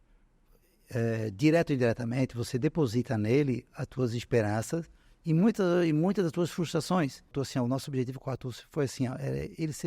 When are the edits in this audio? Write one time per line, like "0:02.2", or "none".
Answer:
0:07.3